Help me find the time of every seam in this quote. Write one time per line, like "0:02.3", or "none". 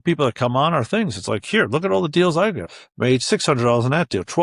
0:02.7